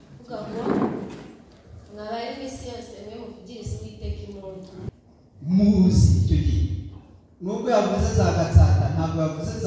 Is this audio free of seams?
no; 1 cut; at 4.9 s

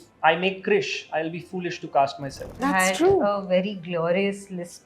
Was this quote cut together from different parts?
yes; 1 cut; at 2.6 s

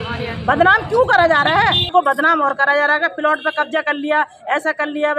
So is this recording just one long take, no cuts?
no; 1 cut; at 1.9 s

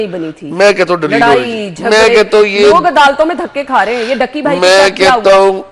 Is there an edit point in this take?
no; 0 cuts

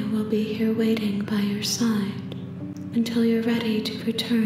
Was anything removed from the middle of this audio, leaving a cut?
no; 0 cuts

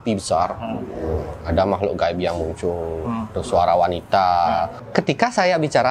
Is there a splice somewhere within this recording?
yes; 1 cut; at 4.8 s

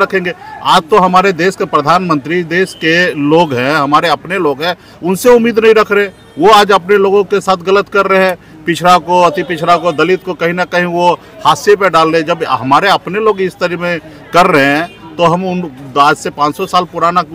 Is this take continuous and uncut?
yes; 0 cuts

